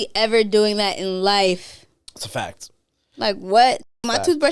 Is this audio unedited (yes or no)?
yes